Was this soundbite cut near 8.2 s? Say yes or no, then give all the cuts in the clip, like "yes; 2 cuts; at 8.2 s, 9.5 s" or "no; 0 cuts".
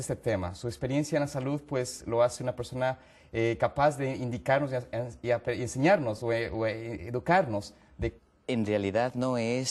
no; 0 cuts